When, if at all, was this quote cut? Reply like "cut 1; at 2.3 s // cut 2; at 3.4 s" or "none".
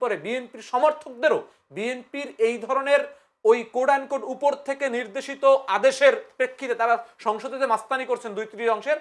none